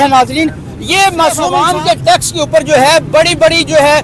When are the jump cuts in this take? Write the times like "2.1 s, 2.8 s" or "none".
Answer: 1.6 s